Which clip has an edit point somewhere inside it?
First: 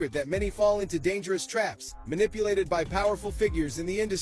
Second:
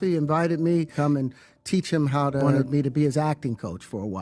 second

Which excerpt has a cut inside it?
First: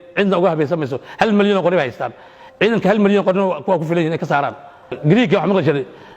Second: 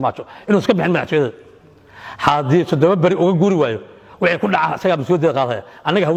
first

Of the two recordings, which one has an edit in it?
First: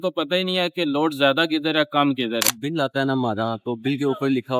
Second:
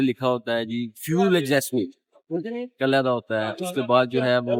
first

